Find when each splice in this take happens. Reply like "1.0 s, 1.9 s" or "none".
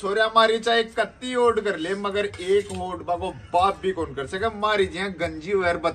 none